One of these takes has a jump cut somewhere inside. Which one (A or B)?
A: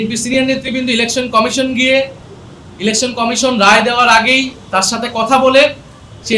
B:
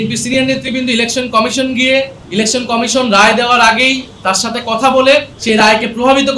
B